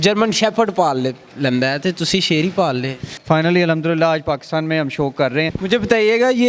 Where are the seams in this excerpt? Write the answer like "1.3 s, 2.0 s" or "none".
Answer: 3.1 s, 5.5 s